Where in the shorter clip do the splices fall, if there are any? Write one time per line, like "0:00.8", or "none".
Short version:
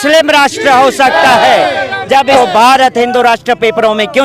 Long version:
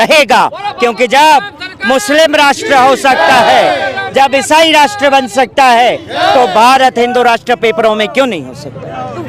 0:02.3